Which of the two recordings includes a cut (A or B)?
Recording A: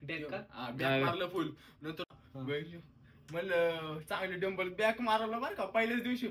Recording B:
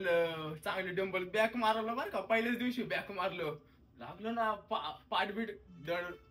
A